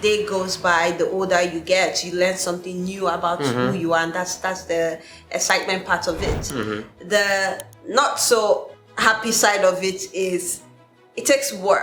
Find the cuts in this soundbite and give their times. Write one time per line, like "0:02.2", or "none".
none